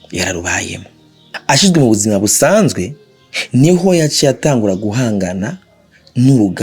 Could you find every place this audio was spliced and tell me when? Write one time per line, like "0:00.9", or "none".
0:01.4